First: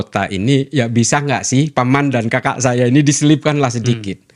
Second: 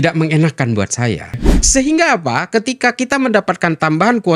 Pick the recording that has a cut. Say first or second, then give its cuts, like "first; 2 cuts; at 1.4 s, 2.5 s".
second; 1 cut; at 1.4 s